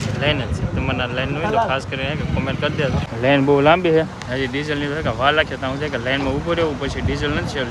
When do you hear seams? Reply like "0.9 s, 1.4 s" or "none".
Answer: 3.1 s